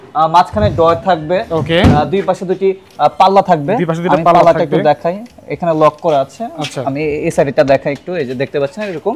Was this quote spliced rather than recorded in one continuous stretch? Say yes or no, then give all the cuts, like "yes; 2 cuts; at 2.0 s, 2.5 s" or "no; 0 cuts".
no; 0 cuts